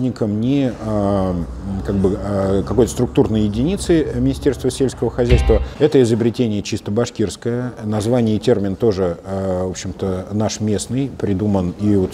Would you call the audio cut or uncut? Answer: cut